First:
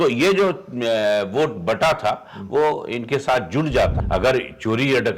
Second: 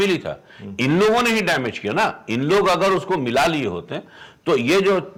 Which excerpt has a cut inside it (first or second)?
first